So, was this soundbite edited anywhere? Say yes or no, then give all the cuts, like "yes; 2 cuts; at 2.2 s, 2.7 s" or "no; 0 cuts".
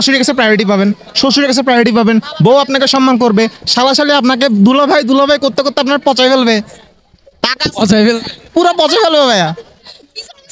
no; 0 cuts